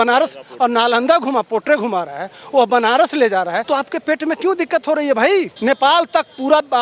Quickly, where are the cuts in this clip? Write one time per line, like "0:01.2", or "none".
0:03.6
0:05.5

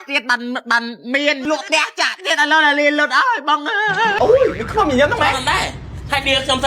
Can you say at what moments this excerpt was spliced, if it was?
0:01.4
0:04.1

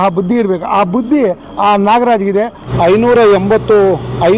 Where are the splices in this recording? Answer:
0:02.6

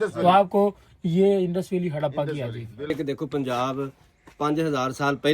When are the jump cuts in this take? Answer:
0:03.0

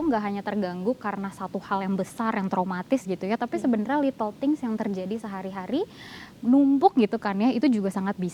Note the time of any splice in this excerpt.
none

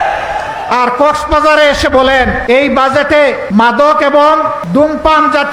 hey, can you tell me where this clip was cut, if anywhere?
0:02.4
0:03.4
0:04.6

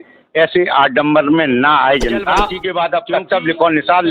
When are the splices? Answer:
0:02.6

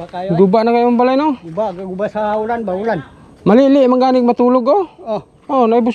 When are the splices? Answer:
none

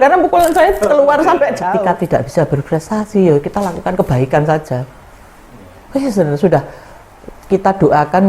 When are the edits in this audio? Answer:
0:01.6

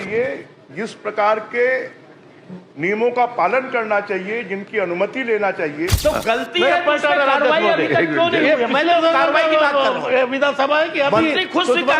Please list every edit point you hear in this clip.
0:05.9

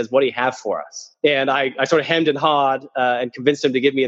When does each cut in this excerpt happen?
0:01.1

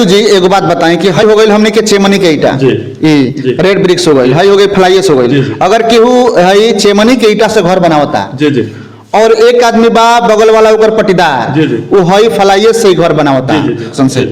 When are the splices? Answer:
0:01.2

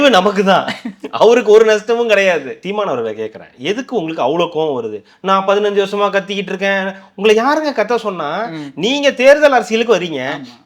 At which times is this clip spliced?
0:02.5

